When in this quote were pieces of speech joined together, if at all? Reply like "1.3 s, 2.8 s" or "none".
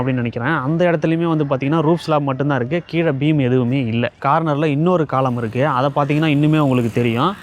4.2 s